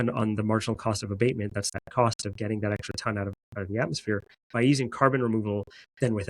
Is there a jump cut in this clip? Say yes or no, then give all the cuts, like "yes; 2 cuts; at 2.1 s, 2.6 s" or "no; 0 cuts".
yes; 1 cut; at 1.7 s